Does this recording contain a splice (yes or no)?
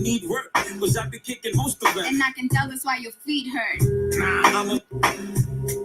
yes